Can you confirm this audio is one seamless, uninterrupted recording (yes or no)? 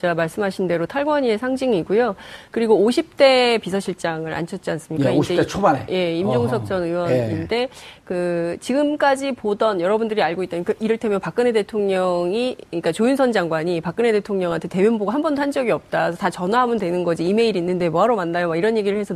yes